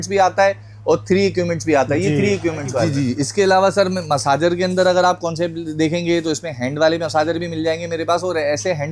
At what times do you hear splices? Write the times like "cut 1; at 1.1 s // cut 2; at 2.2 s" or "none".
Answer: cut 1; at 2.9 s